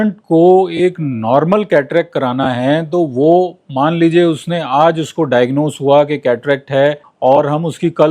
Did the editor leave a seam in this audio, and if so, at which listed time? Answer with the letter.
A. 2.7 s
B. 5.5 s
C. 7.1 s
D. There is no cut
C